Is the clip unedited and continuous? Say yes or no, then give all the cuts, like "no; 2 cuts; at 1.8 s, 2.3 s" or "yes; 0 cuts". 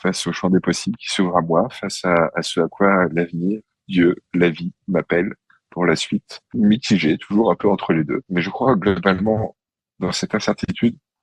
no; 2 cuts; at 6.5 s, 8.2 s